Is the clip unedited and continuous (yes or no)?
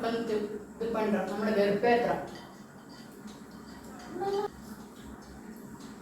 no